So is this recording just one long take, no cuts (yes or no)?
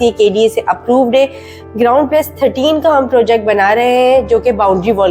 yes